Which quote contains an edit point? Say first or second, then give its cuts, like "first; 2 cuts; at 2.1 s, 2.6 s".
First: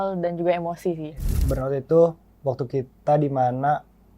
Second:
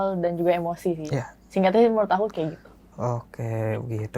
first; 1 cut; at 1.1 s